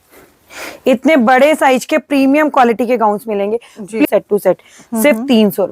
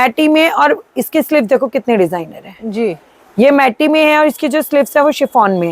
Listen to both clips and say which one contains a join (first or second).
first